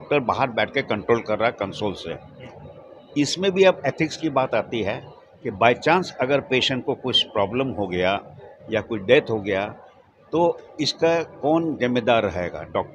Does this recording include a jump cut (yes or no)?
no